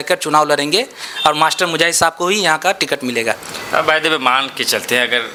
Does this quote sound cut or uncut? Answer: uncut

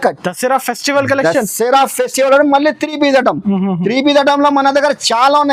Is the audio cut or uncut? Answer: uncut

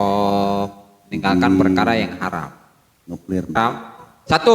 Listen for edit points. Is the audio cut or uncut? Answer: cut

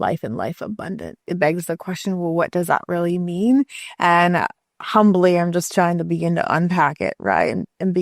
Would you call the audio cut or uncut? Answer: cut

